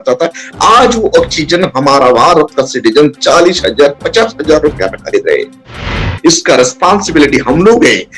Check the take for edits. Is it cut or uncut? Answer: cut